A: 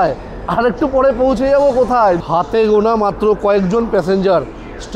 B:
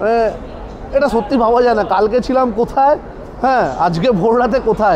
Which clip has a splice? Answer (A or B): A